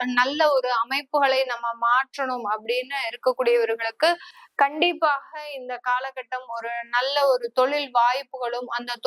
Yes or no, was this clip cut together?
no